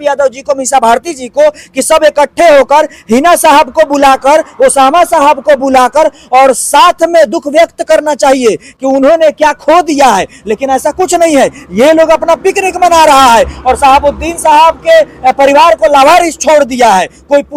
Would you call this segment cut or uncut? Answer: uncut